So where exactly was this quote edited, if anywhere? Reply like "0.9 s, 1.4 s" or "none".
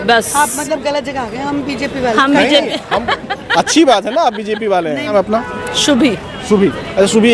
5.1 s